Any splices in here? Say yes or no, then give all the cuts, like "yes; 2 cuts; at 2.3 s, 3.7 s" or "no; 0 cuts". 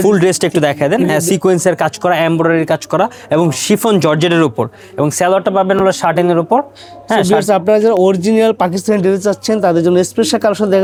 no; 0 cuts